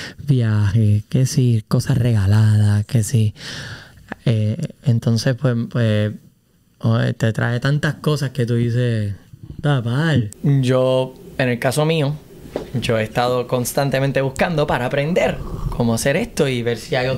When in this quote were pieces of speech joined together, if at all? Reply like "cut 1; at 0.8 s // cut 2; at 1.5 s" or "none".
cut 1; at 10.3 s